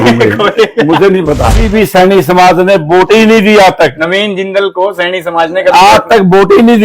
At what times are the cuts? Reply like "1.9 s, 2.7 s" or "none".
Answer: 1.7 s